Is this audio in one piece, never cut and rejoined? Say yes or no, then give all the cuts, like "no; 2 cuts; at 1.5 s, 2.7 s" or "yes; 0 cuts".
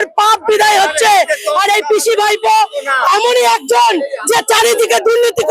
yes; 0 cuts